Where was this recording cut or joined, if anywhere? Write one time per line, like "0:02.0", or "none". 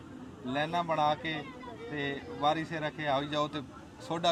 none